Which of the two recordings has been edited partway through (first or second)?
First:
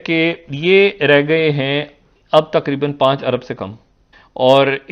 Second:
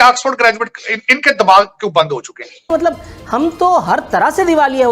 second